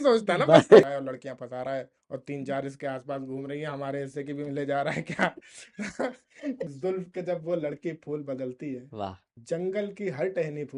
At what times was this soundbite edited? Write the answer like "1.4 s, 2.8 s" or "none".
0.8 s, 6.7 s